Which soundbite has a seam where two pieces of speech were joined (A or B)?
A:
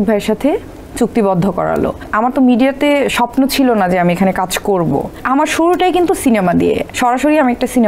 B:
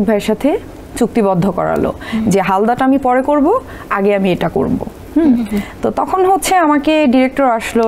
A